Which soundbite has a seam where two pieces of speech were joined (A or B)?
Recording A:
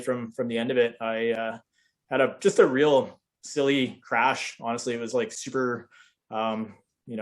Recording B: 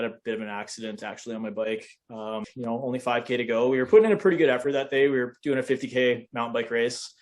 B